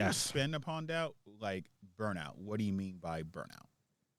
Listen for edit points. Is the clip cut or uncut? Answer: uncut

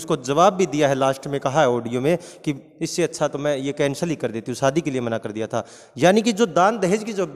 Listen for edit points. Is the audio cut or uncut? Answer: uncut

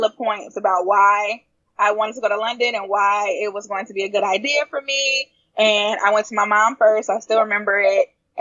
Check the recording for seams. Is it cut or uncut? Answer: uncut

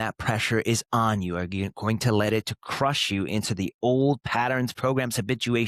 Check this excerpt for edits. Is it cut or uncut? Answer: uncut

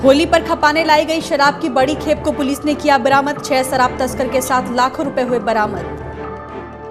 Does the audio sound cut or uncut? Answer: uncut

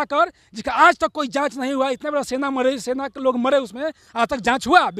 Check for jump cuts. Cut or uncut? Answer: uncut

